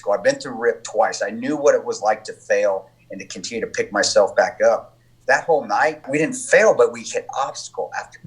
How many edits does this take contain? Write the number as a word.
one